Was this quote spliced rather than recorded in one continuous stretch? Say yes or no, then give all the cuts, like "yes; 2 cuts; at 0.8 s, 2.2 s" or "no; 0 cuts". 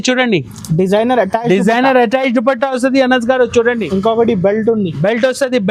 no; 0 cuts